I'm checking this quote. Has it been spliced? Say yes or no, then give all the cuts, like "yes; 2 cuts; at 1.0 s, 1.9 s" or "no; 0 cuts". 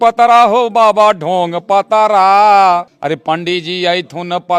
no; 0 cuts